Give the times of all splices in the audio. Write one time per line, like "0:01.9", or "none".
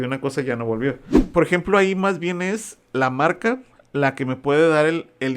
0:01.2